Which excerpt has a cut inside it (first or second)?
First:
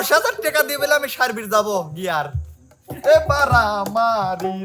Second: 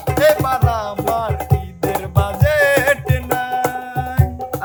first